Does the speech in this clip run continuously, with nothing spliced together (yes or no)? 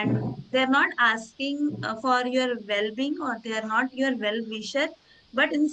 yes